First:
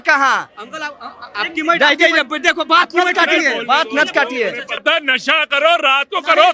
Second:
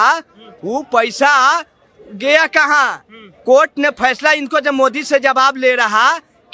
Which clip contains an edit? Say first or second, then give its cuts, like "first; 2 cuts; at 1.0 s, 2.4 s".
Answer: first; 1 cut; at 4.8 s